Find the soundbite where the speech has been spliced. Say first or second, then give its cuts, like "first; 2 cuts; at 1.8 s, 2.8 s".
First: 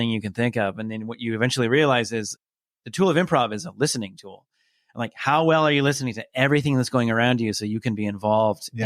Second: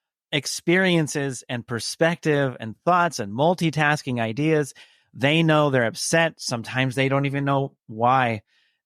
first; 1 cut; at 2.4 s